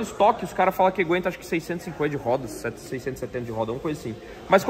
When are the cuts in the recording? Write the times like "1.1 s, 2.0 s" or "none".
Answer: none

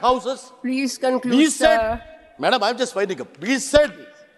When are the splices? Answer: none

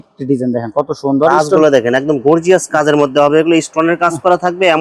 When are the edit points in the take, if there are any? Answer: none

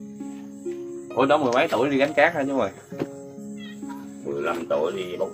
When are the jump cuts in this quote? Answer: 1.0 s, 2.8 s, 4.4 s

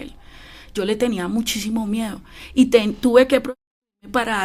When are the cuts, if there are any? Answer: none

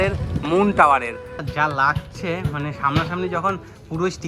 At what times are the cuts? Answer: 1.4 s

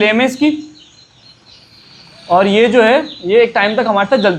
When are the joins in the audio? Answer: none

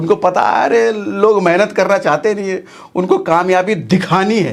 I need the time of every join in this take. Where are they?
none

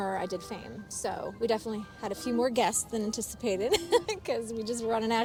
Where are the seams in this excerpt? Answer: none

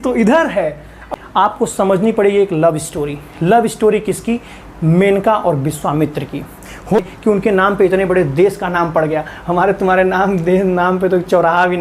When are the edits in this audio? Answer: 1.1 s, 7.0 s

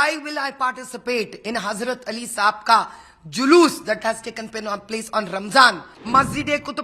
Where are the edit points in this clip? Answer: 5.9 s

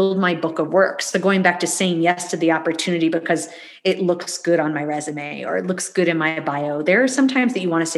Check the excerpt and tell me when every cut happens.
none

